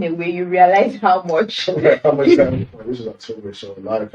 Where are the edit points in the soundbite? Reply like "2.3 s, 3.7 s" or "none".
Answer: 2.6 s